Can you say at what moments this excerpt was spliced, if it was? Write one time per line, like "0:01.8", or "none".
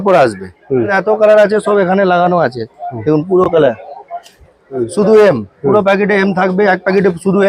0:00.9
0:04.7